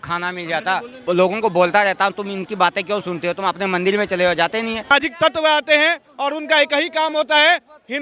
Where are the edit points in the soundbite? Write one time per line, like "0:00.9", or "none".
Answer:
0:01.0
0:04.9